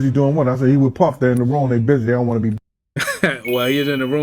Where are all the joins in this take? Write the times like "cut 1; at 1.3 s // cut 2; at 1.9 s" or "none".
cut 1; at 0.9 s